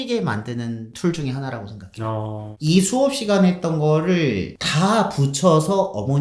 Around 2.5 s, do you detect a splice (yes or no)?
yes